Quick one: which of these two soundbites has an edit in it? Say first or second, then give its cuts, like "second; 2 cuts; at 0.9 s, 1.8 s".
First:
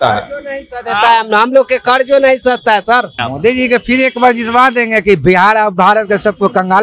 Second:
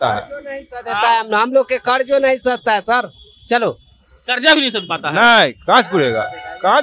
first; 1 cut; at 3.2 s